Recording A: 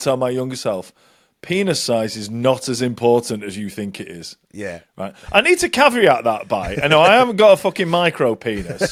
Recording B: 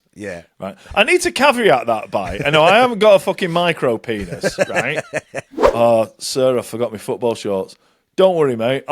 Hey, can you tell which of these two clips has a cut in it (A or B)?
B